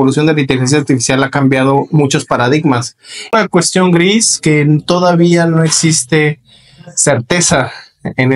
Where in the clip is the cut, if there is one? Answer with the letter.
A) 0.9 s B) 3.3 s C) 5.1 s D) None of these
B